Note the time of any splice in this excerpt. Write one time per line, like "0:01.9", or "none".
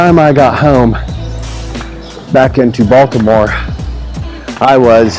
none

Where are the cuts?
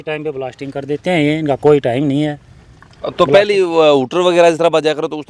none

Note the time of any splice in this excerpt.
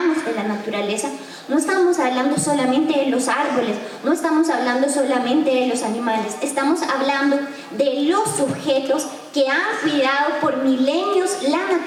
none

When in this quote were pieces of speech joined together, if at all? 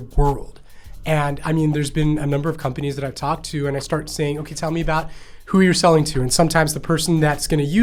none

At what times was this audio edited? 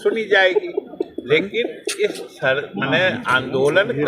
none

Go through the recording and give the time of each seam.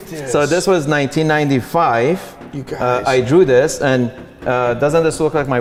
none

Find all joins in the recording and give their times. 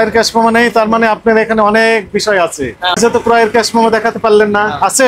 0:03.0

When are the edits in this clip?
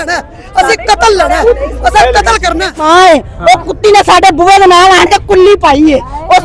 0:02.8

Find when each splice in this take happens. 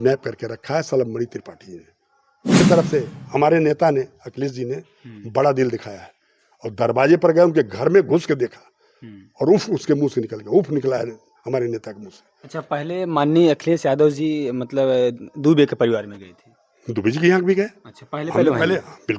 0:02.6

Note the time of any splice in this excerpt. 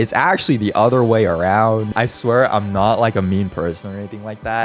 0:01.9

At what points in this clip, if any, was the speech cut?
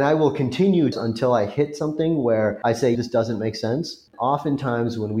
0:00.9
0:02.8
0:04.1

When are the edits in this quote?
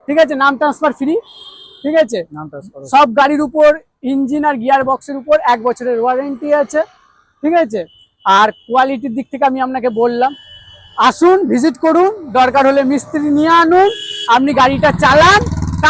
none

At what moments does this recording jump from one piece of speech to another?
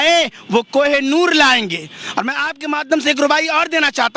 none

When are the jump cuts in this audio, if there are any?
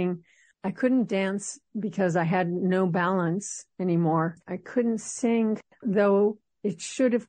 0:04.4
0:05.6

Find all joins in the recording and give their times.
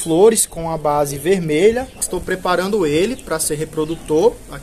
0:02.0

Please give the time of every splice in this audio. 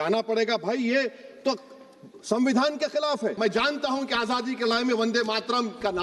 0:03.4

